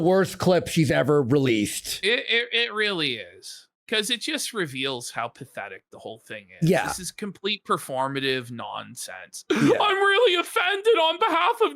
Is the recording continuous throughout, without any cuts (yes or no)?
yes